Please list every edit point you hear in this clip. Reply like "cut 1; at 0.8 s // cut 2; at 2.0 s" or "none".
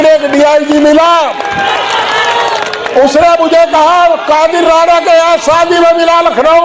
none